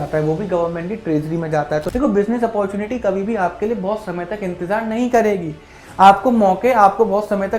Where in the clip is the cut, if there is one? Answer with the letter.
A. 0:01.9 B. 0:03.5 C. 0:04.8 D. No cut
A